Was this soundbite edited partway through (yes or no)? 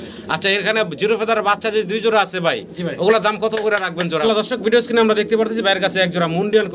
yes